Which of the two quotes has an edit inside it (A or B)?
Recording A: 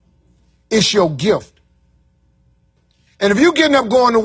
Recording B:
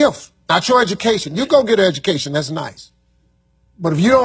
A